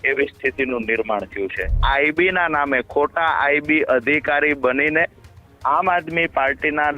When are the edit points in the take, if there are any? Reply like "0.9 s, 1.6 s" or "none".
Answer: 1.8 s